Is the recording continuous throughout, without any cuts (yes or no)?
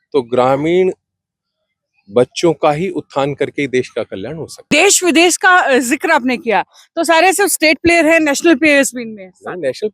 no